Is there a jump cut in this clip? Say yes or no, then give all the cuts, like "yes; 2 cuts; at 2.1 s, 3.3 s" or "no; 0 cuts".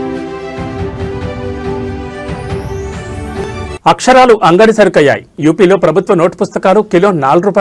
no; 0 cuts